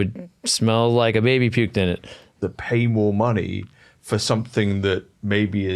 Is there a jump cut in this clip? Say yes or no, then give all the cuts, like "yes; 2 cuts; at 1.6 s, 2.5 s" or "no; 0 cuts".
yes; 1 cut; at 2.3 s